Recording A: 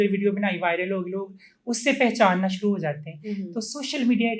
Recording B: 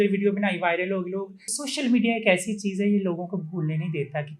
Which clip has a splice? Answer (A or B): B